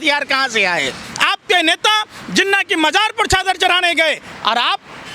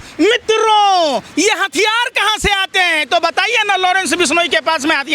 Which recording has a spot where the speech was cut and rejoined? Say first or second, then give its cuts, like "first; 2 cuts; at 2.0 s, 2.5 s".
first; 1 cut; at 1.1 s